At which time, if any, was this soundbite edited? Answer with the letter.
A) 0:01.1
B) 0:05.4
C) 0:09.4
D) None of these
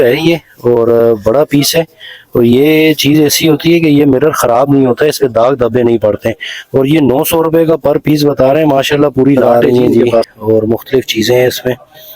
C